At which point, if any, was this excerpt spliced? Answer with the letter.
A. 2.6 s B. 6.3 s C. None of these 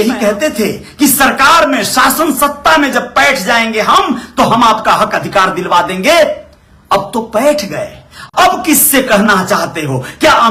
C